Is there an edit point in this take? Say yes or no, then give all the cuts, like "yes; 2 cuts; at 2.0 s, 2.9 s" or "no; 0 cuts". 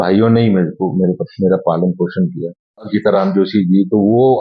yes; 1 cut; at 2.9 s